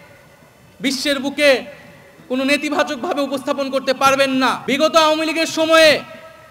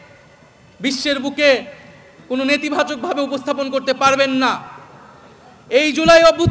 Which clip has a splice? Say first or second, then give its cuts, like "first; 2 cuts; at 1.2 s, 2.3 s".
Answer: first; 1 cut; at 4.6 s